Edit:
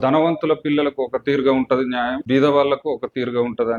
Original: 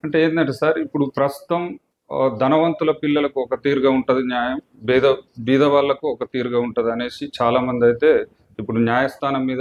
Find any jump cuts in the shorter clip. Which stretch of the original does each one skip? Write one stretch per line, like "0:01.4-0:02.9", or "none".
0:04.6-0:05.4

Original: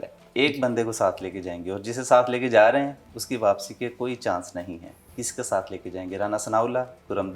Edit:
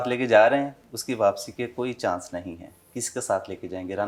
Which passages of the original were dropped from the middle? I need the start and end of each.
none

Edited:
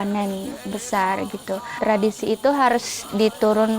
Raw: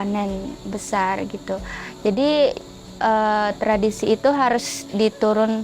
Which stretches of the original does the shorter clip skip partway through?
0:01.8-0:03.6

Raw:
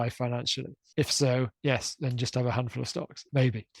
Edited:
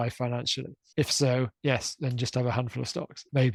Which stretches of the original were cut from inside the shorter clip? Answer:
none

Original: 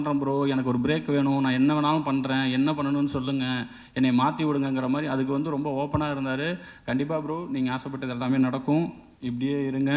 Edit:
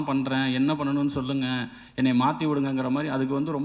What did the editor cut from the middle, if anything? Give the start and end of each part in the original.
none

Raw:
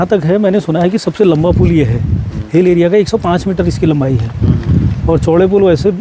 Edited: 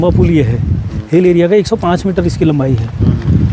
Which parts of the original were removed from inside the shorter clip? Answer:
none

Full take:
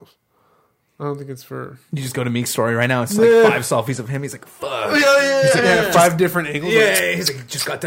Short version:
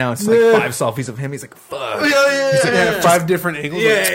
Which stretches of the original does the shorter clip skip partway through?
none

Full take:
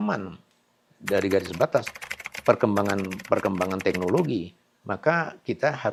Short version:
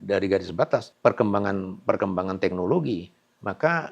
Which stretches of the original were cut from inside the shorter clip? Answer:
0:01.9-0:02.3

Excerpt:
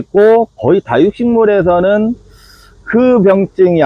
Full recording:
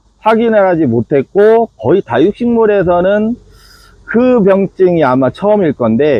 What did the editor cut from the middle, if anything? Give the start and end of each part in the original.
none

